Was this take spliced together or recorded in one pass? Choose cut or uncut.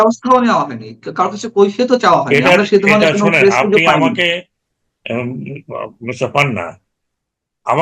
uncut